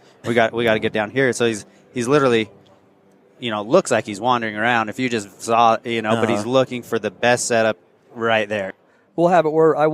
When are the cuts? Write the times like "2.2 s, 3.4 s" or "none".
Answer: 8.7 s